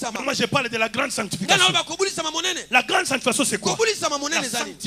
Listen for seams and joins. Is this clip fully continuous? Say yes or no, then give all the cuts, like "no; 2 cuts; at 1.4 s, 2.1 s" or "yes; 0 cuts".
yes; 0 cuts